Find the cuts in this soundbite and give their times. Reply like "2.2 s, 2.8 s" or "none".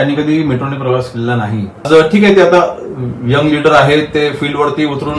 1.9 s

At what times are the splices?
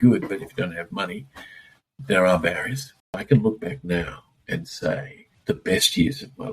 3.2 s, 5.3 s

